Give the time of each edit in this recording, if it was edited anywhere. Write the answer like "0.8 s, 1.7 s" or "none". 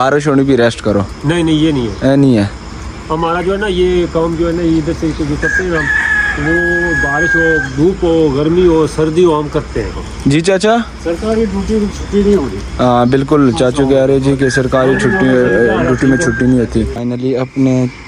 10.0 s, 17.0 s